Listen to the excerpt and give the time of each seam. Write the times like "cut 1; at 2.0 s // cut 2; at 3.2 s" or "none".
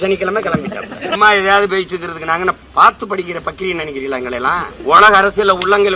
cut 1; at 1.1 s // cut 2; at 2.6 s // cut 3; at 4.7 s